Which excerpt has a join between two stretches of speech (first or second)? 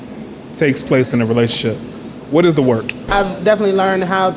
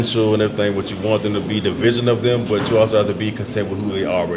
first